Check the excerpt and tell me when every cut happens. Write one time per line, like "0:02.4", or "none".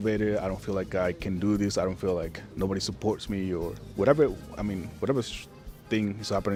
none